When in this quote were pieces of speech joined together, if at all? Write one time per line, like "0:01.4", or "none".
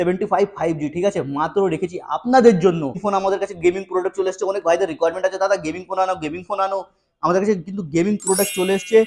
0:03.0